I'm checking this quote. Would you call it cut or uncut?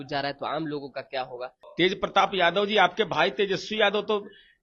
cut